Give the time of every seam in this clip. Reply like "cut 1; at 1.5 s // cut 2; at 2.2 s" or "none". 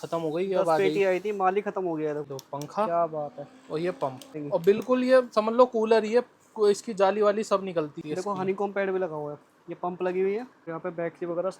cut 1; at 2.3 s // cut 2; at 4.4 s // cut 3; at 8.0 s // cut 4; at 10.6 s